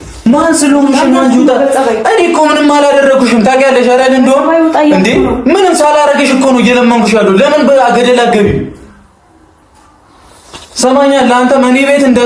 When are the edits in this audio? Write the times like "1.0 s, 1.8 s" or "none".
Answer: none